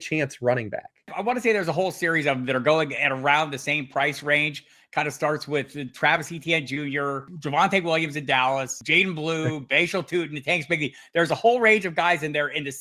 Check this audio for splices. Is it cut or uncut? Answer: cut